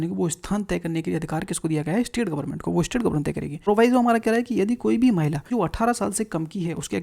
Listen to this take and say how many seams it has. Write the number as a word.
two